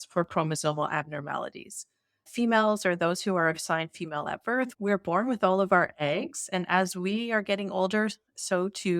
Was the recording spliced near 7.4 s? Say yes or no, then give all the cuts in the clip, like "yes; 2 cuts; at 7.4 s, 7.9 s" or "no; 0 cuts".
no; 1 cut; at 4.7 s